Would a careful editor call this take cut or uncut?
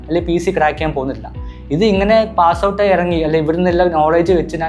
uncut